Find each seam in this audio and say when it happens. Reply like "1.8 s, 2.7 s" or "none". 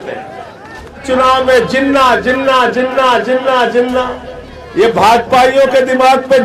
1.0 s